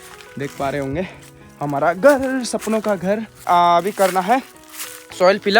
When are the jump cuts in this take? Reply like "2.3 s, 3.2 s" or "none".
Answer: 3.5 s